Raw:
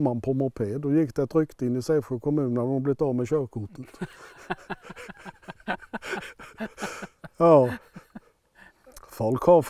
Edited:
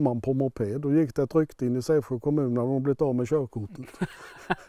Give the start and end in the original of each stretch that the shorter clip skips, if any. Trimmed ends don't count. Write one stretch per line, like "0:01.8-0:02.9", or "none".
none